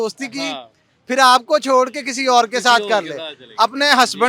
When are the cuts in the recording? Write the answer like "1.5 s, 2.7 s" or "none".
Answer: none